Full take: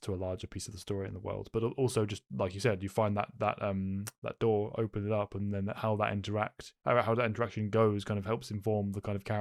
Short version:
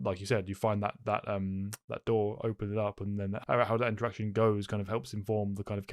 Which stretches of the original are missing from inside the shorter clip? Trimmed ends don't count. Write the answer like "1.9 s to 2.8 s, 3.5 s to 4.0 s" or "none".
5.7 s to 6.7 s